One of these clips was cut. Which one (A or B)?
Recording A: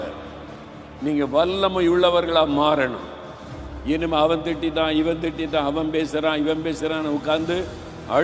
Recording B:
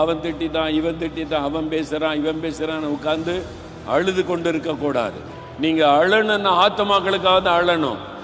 B